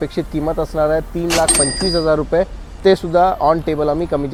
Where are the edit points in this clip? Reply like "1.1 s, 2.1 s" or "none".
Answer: none